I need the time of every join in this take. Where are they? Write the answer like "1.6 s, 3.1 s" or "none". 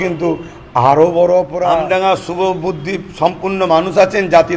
1.8 s